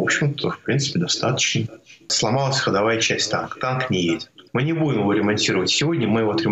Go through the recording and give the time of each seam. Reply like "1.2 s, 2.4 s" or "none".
2.1 s, 4.4 s